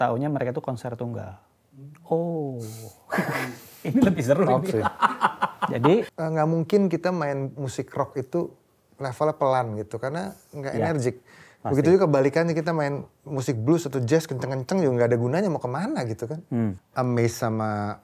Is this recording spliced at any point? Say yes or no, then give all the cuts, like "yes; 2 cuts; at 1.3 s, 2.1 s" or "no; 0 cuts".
yes; 2 cuts; at 6.1 s, 16.8 s